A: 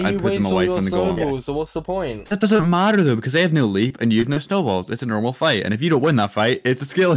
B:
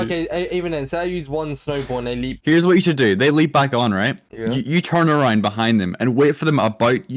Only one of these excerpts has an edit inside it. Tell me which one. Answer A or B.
B